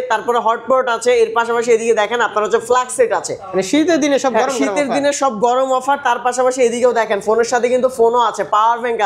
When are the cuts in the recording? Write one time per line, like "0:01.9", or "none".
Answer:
none